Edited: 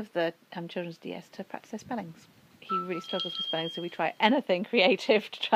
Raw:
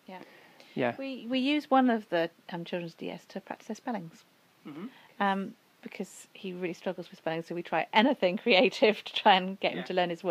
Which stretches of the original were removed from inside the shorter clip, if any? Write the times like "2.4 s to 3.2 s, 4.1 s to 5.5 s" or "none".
4.5 s to 6.2 s